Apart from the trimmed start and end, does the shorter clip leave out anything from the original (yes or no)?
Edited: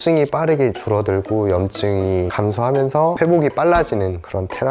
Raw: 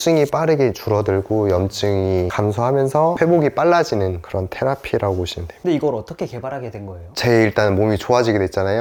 no